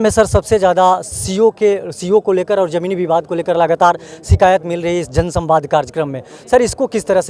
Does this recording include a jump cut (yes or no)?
no